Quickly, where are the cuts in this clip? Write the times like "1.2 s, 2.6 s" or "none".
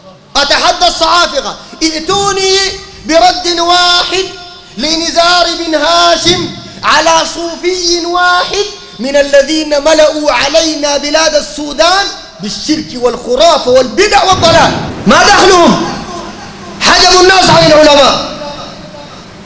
14.9 s